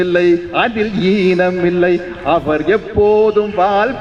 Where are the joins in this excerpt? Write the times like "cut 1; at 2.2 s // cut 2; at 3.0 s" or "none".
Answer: none

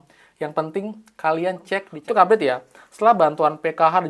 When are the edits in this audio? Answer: cut 1; at 1.9 s

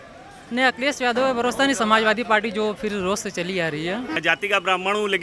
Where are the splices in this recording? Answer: cut 1; at 4.2 s

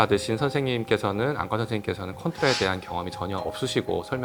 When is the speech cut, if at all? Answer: none

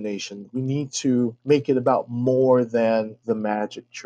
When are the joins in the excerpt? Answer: cut 1; at 1.4 s // cut 2; at 3.2 s

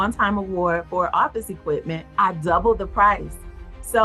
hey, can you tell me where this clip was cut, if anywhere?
cut 1; at 2.1 s

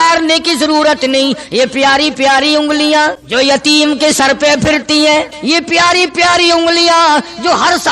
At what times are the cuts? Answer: cut 1; at 3.2 s // cut 2; at 5.3 s

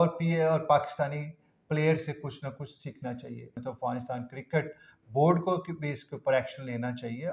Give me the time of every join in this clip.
cut 1; at 3.6 s

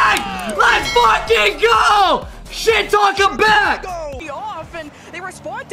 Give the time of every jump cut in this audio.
cut 1; at 4.2 s

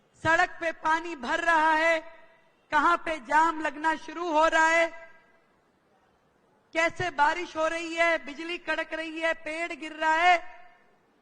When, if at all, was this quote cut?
none

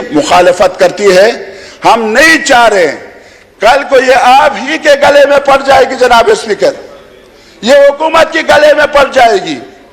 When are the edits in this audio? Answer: none

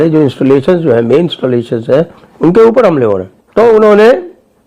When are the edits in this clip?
cut 1; at 3.3 s

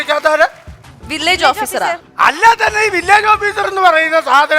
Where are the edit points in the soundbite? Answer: cut 1; at 2.1 s

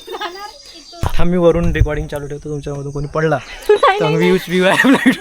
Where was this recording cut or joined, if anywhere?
cut 1; at 1.0 s

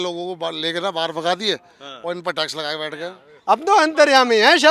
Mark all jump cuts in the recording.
cut 1; at 3.2 s

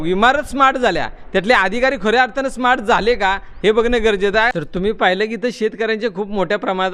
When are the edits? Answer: cut 1; at 4.5 s

